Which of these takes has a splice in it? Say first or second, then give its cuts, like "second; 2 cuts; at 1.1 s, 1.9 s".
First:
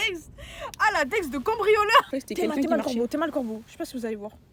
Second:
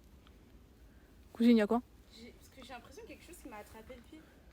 first; 1 cut; at 2.1 s